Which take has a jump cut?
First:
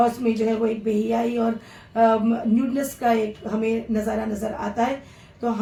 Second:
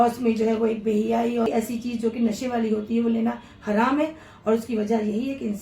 second; 1 cut; at 1.5 s

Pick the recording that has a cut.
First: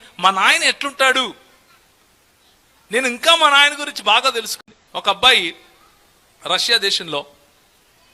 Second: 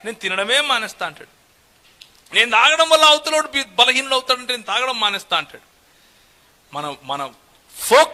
first; 1 cut; at 4.5 s

